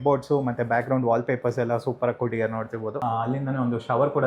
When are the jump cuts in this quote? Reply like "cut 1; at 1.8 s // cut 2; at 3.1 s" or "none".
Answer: cut 1; at 3.0 s